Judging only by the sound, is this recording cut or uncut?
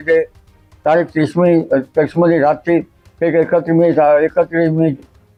uncut